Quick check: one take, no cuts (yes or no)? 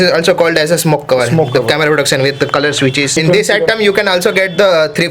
no